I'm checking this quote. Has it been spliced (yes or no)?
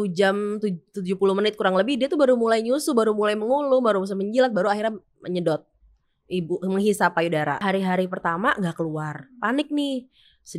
yes